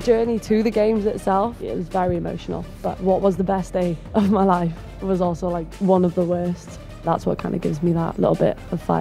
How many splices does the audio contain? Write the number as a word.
four